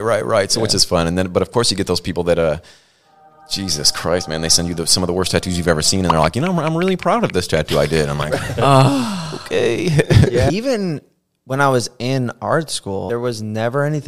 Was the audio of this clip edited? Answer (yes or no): yes